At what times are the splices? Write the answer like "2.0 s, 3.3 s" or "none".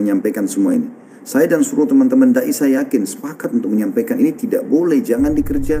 none